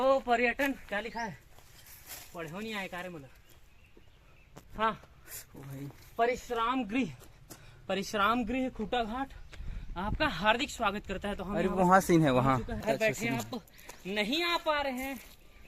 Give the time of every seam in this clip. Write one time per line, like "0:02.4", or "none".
0:12.8